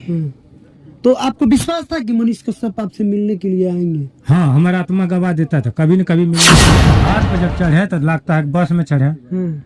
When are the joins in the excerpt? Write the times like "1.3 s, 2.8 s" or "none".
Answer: 6.7 s